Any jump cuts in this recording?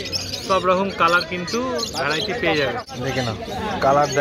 yes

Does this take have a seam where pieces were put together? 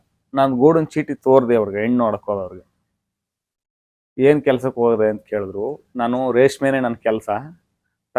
no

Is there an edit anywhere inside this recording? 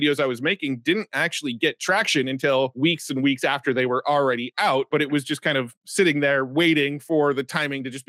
no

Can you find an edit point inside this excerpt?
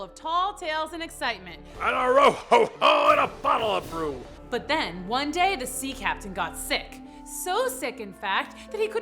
yes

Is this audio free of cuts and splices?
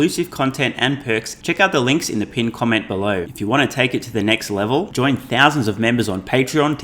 no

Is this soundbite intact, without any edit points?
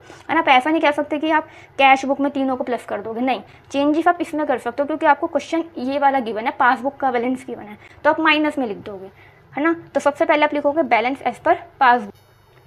yes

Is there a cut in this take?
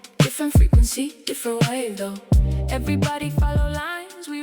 no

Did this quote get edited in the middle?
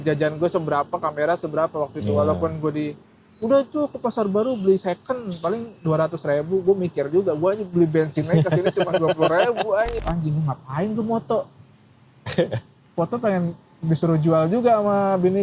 yes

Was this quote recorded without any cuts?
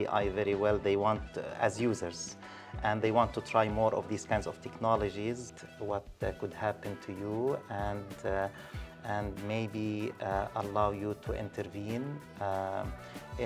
no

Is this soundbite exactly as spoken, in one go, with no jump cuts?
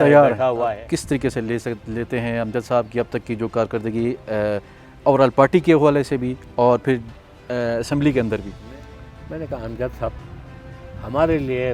no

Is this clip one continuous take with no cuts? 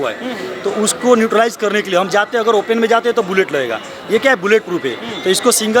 yes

